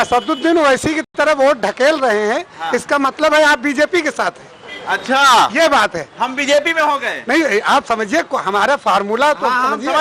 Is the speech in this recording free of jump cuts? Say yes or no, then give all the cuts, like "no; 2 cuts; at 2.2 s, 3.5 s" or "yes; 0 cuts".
yes; 0 cuts